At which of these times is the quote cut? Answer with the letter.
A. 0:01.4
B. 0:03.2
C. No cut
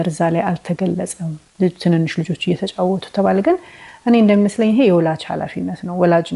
C